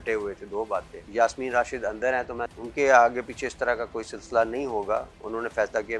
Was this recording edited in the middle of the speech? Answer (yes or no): yes